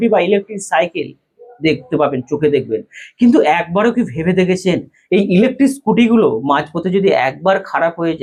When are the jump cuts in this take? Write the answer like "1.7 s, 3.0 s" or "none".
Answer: none